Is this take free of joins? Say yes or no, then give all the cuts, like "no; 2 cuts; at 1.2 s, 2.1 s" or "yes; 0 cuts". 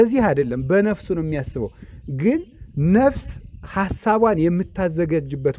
yes; 0 cuts